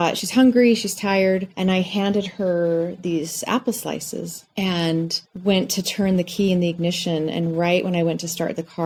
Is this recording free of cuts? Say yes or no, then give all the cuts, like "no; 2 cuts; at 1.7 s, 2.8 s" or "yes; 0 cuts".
yes; 0 cuts